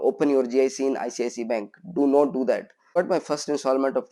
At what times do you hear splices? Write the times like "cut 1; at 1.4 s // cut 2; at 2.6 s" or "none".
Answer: cut 1; at 3.0 s